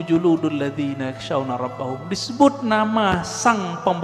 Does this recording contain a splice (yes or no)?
no